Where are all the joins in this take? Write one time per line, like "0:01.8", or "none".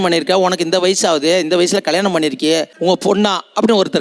none